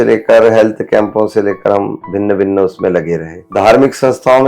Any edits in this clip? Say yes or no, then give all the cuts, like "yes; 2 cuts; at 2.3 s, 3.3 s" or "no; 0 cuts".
yes; 1 cut; at 3.3 s